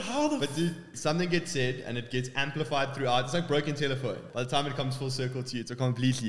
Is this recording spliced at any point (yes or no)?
yes